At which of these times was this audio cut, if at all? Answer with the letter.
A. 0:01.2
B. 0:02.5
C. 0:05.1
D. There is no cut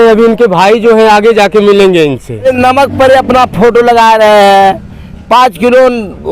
B